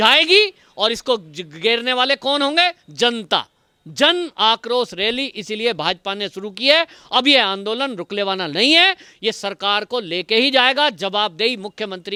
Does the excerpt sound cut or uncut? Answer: uncut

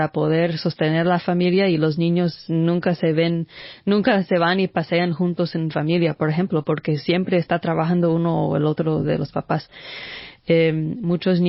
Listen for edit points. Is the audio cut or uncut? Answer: uncut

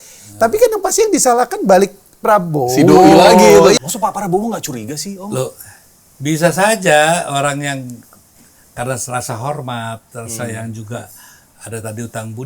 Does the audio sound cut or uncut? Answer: cut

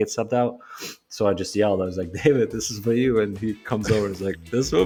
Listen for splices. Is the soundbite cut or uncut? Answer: uncut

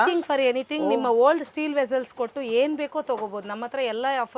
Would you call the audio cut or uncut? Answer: uncut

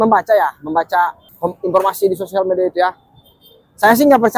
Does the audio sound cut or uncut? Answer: cut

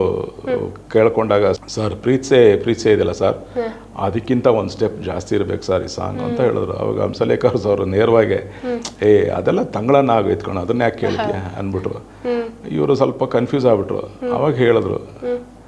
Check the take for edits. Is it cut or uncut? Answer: cut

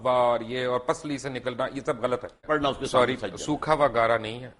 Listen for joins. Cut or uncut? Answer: cut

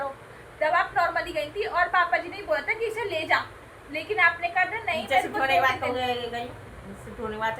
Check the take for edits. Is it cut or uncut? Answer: uncut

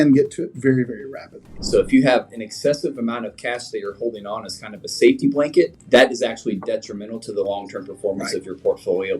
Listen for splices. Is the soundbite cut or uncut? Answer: cut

